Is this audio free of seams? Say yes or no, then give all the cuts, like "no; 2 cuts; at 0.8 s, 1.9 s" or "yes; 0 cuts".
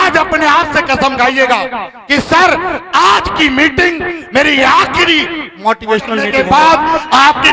no; 1 cut; at 6.3 s